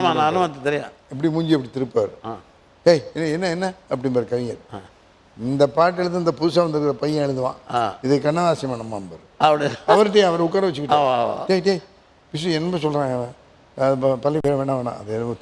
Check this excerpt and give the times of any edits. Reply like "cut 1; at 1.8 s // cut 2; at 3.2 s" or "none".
none